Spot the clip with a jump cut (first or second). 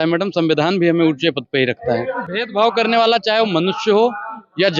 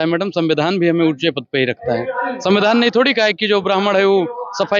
first